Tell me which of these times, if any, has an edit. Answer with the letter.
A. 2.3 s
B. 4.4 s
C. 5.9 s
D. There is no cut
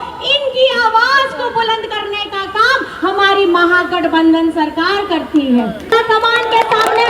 C